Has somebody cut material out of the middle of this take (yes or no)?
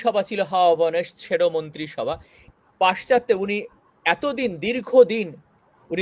yes